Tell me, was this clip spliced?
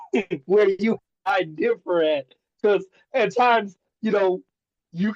yes; 1 cut; at 1.1 s

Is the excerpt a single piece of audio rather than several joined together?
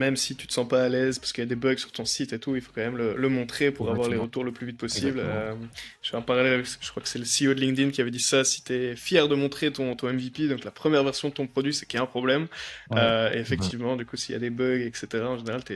yes; 0 cuts

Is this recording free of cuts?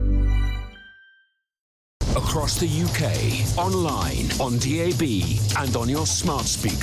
no; 1 cut; at 2.0 s

